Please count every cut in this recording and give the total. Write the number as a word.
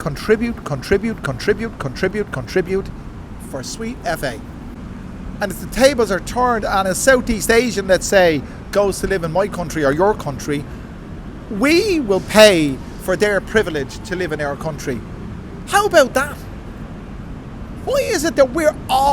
one